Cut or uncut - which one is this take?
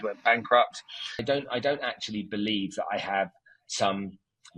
cut